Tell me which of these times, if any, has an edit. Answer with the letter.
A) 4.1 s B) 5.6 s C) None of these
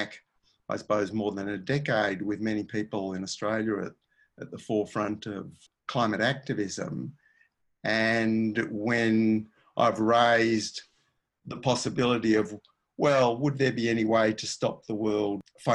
B